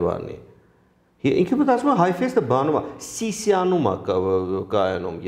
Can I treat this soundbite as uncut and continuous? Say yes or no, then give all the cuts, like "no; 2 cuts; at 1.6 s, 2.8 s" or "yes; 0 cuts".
yes; 0 cuts